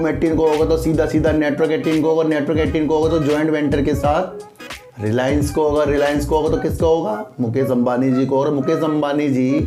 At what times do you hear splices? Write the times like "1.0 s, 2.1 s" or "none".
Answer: none